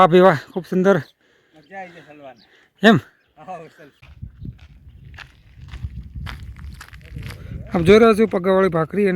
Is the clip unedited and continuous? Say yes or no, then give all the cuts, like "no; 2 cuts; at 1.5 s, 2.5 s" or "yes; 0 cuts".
no; 1 cut; at 4.0 s